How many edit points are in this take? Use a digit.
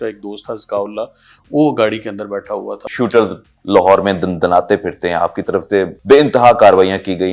2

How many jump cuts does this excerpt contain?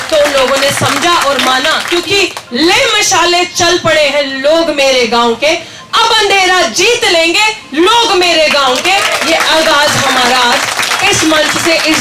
1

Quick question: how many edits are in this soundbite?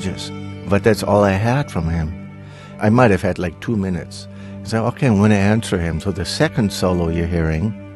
2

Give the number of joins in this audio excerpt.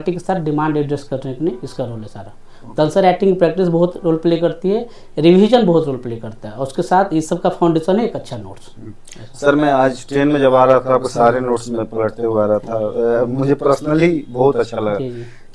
0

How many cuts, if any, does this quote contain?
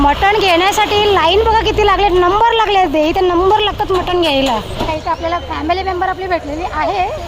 1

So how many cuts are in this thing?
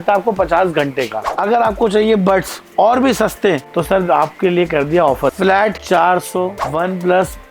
3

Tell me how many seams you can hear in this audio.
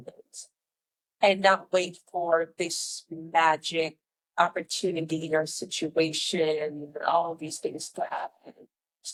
0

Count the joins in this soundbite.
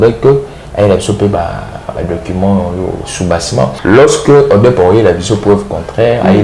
1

